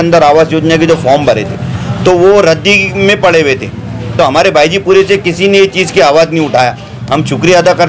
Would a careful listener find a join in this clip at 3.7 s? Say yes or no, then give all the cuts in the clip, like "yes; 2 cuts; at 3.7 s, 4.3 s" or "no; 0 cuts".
no; 0 cuts